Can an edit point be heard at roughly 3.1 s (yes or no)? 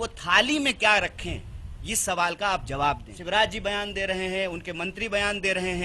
yes